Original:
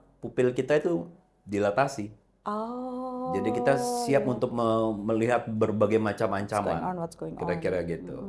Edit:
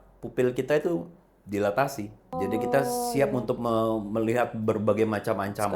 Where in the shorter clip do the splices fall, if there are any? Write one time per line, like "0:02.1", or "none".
0:02.3